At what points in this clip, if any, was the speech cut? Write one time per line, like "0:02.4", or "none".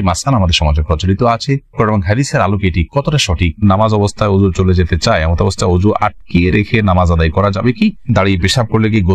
0:03.6
0:08.1